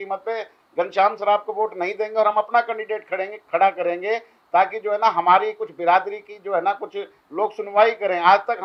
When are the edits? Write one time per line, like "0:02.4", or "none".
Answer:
none